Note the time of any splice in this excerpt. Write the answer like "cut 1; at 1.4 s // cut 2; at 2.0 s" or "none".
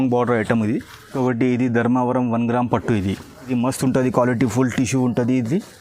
cut 1; at 1.1 s // cut 2; at 3.5 s